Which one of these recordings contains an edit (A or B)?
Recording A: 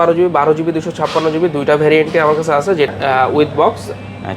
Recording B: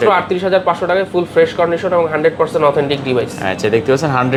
A